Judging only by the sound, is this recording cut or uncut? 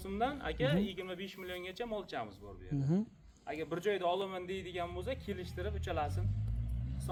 uncut